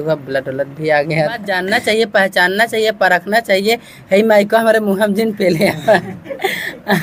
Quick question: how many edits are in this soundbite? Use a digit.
1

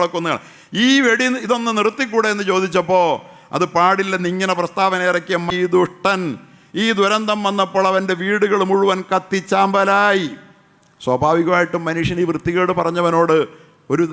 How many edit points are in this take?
1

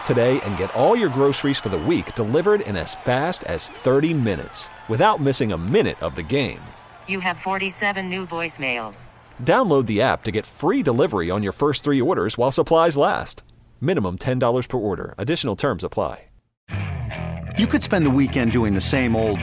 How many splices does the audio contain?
1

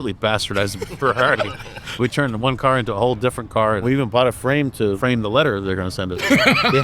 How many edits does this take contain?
2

